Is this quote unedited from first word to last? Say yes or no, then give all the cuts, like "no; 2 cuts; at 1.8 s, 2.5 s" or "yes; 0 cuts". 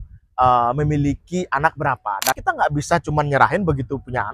no; 1 cut; at 2.4 s